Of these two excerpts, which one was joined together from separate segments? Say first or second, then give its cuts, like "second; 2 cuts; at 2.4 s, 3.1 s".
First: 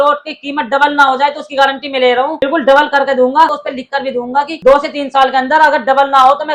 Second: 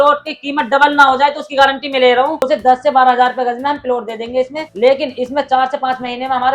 second; 1 cut; at 2.4 s